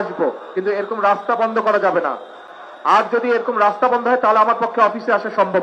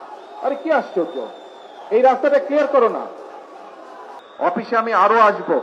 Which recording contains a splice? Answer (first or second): second